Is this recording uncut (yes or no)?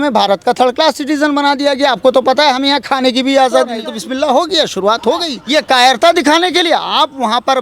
no